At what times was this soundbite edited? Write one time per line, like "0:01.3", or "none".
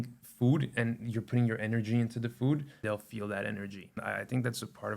0:02.8
0:04.0